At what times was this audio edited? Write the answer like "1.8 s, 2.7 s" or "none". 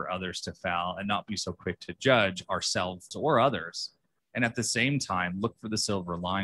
3.1 s